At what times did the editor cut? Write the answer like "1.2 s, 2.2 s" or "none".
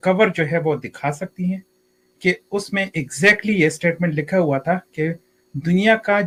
none